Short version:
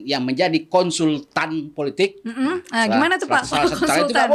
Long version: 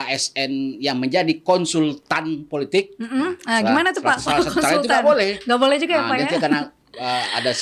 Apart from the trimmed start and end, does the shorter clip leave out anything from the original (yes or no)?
no